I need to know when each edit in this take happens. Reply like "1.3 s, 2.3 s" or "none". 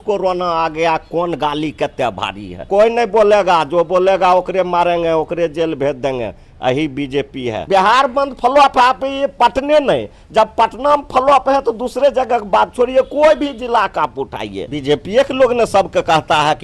2.7 s, 7.6 s, 14.7 s

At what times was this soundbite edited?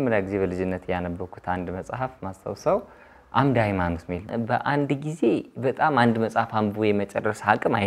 4.2 s

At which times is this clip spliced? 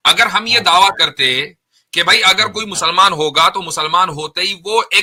none

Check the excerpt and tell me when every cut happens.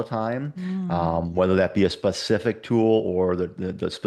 none

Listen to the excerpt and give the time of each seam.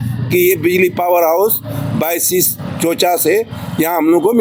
none

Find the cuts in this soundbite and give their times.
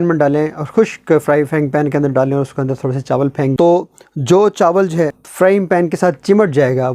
none

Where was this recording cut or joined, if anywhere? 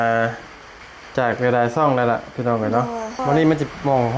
3.2 s

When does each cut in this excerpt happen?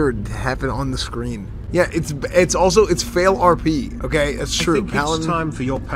1.5 s

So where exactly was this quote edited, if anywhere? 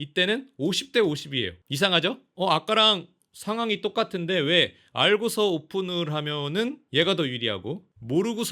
1.6 s, 2.3 s

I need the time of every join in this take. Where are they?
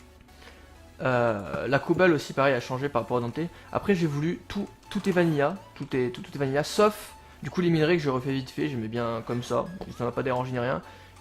2.8 s

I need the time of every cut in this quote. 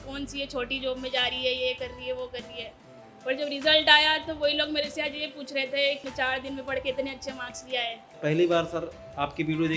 6.1 s, 8.2 s

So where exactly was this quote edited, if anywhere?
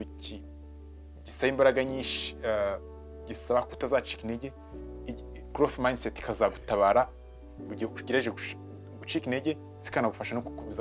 none

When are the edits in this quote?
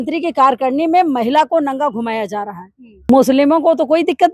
3.1 s

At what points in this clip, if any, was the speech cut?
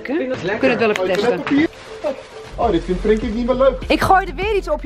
1.7 s, 3.8 s

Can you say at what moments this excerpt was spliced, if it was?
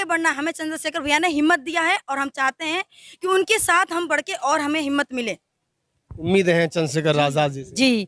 5.5 s

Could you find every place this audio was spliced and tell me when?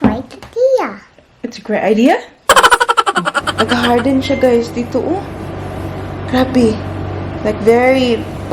2.3 s, 3.4 s

